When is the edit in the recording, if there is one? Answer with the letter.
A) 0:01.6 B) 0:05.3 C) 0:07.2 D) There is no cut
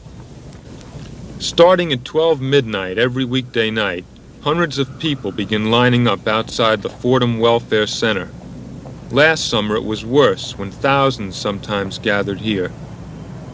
D